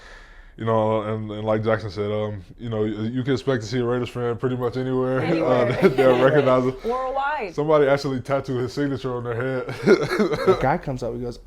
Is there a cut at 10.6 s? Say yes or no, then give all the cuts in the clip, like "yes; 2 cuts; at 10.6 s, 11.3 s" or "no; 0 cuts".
yes; 1 cut; at 10.6 s